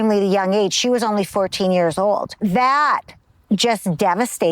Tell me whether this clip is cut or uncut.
cut